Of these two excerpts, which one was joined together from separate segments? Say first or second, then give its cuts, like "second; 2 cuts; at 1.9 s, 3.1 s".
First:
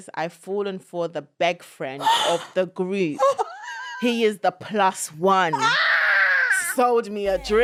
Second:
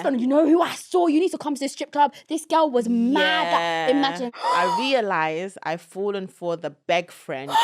second; 1 cut; at 4.3 s